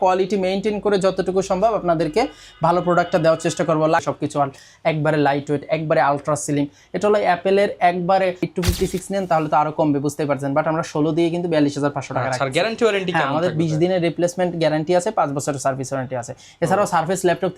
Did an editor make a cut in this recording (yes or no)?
yes